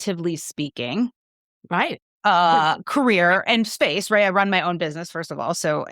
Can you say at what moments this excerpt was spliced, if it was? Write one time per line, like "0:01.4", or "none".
none

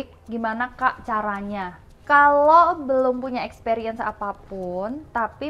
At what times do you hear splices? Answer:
0:02.0

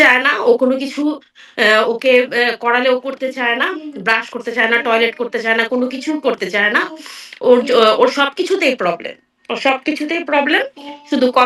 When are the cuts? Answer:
none

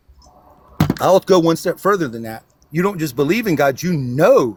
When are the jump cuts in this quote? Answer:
none

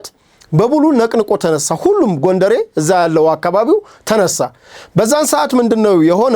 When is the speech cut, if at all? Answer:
none

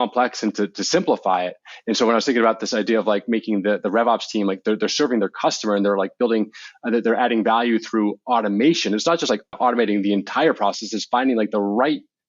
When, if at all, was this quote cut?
0:09.6

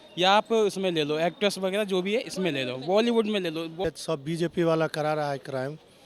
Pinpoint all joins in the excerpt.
0:03.8

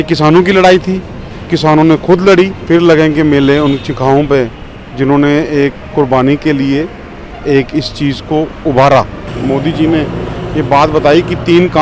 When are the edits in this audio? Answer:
0:02.6
0:09.3

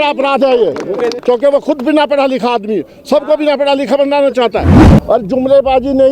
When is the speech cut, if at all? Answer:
0:01.2
0:04.9

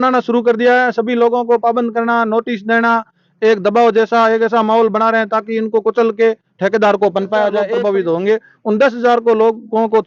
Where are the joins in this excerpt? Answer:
0:07.7

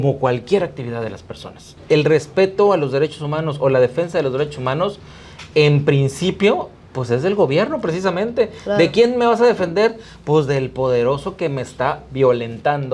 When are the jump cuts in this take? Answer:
0:01.7

